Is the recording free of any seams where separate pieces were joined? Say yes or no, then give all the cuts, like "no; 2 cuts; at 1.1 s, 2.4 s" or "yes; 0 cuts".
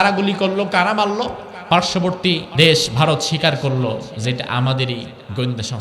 no; 2 cuts; at 1.5 s, 2.5 s